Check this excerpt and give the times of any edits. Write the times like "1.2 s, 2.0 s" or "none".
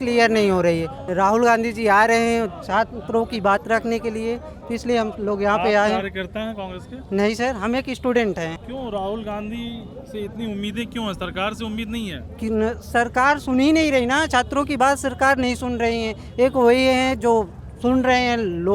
1.0 s, 8.6 s